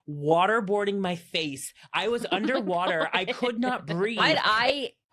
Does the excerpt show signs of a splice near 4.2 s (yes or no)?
yes